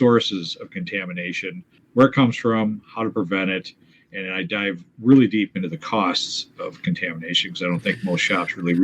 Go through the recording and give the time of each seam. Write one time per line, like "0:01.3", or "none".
0:01.7